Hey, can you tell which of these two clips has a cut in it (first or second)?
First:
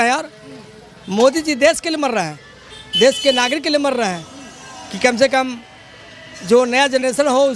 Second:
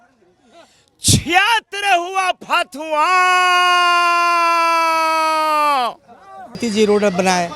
second